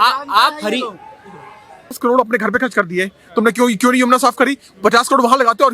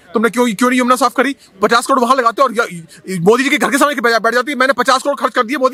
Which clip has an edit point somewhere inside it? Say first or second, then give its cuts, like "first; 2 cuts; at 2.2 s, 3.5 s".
first; 1 cut; at 2.0 s